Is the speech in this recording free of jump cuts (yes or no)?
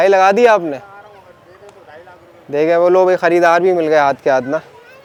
yes